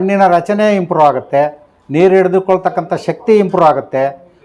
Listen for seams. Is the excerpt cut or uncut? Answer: uncut